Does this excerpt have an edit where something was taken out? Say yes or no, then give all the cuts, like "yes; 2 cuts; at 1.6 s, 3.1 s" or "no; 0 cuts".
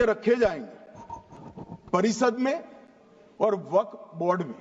no; 0 cuts